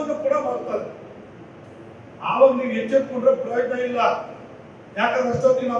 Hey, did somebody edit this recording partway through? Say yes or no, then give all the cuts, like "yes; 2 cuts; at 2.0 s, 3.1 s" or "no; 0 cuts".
no; 0 cuts